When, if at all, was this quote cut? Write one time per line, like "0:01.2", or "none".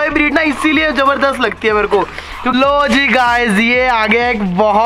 0:02.5

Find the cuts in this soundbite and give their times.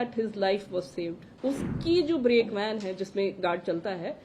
0:01.3

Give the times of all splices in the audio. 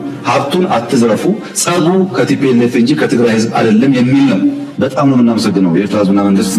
none

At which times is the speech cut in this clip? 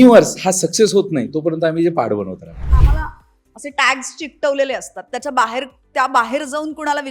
0:02.7

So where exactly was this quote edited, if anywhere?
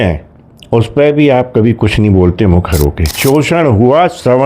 0:03.1

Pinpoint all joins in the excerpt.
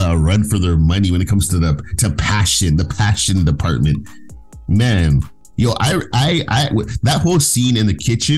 0:05.4

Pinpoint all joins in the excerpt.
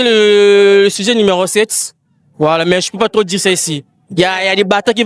none

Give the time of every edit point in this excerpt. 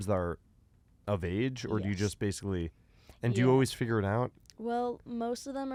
none

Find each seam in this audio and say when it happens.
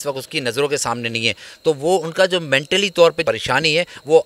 0:03.2

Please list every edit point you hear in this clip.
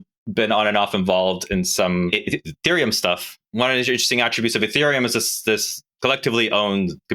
0:02.1
0:03.4
0:05.8

